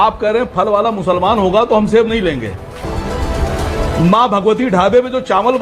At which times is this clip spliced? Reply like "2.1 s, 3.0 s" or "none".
2.9 s